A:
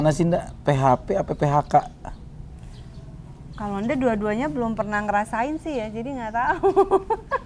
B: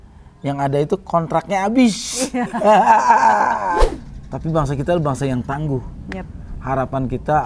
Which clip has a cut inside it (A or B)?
B